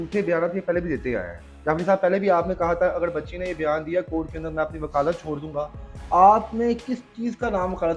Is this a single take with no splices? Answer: yes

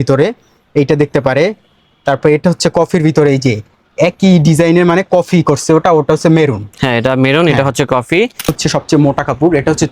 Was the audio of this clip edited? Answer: yes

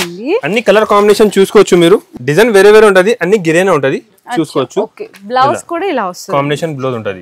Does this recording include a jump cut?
yes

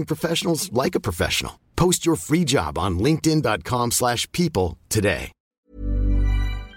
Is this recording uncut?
no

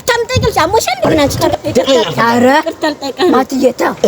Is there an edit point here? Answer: yes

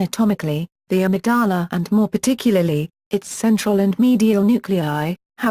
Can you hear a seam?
yes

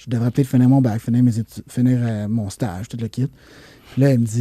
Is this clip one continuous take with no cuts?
yes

